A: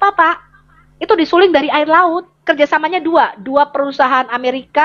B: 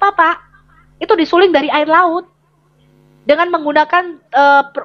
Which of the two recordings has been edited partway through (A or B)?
A